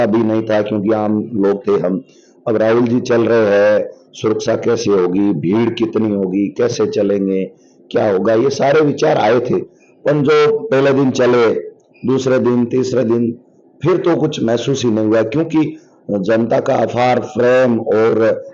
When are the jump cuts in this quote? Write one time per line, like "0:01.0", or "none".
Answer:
none